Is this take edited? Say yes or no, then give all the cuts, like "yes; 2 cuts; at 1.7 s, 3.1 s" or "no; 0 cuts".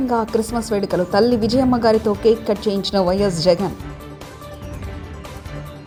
no; 0 cuts